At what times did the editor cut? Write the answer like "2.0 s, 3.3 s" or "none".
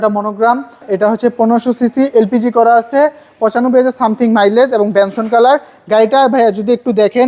1.1 s